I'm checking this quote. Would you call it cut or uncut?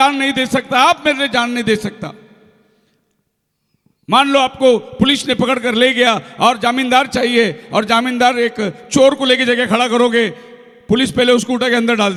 uncut